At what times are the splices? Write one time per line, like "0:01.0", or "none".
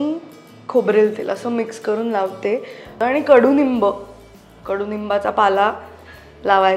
0:02.9